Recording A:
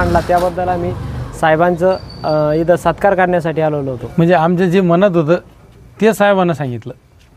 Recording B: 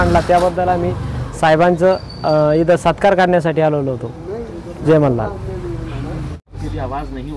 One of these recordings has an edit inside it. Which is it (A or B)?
A